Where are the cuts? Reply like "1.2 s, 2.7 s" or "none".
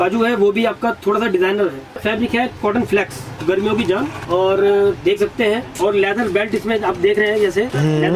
1.9 s, 3.3 s, 4.2 s, 5.7 s